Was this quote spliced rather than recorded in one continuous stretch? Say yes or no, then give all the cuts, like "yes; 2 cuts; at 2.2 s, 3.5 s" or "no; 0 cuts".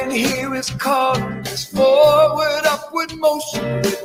no; 0 cuts